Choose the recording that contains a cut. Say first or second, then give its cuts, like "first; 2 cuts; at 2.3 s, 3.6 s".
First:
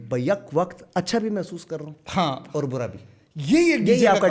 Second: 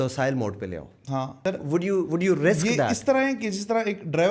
second; 1 cut; at 1.3 s